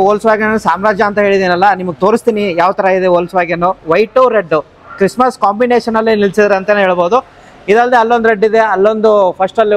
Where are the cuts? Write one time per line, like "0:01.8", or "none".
none